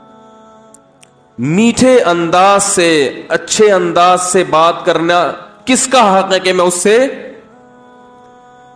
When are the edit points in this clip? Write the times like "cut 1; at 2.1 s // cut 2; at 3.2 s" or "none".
cut 1; at 1.3 s // cut 2; at 7.4 s